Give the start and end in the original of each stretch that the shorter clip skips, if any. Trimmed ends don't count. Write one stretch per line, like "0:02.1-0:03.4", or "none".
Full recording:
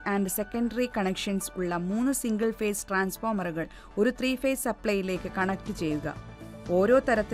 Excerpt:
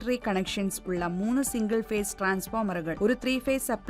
0:03.6-0:03.9